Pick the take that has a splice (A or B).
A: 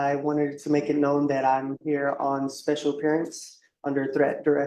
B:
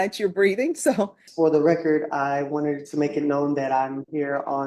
B